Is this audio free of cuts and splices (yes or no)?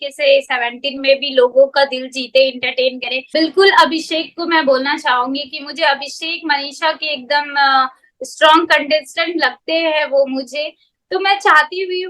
no